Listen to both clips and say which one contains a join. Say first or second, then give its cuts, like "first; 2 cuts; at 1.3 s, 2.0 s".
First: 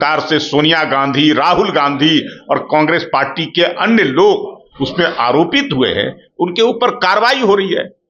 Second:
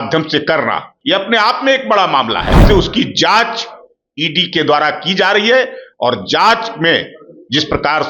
second; 2 cuts; at 0.9 s, 2.6 s